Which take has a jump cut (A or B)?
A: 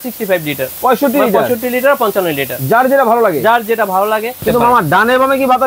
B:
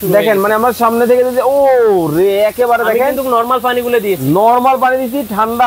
A